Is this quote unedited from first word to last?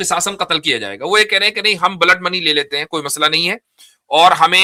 yes; 0 cuts

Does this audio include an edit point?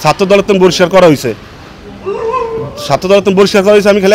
no; 0 cuts

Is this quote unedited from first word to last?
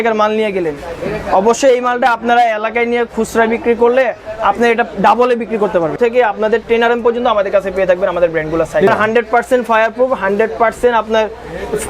no; 2 cuts; at 6.0 s, 8.9 s

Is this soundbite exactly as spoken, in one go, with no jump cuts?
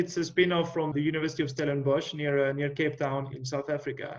no; 2 cuts; at 0.9 s, 3.3 s

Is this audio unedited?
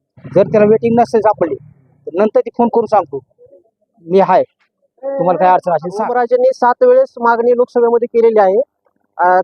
no; 1 cut; at 6.1 s

